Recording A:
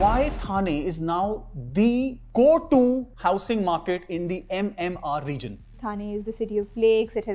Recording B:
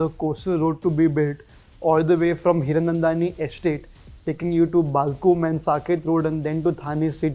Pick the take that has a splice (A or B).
A